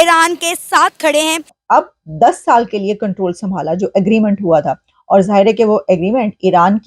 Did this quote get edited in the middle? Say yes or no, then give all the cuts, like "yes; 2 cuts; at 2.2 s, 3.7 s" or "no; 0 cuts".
yes; 1 cut; at 1.5 s